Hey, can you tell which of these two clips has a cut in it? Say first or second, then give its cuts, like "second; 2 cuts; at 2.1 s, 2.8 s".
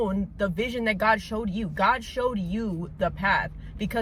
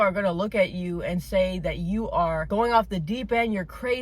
second; 1 cut; at 2.4 s